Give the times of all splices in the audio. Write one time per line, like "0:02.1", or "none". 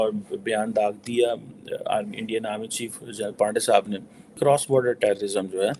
0:04.4

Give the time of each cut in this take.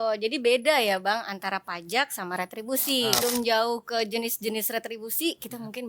0:03.2

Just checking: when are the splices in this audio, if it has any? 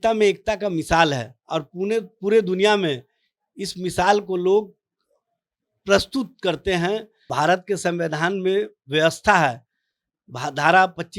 0:07.2

